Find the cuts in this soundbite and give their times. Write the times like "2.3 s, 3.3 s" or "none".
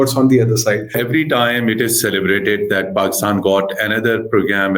1.0 s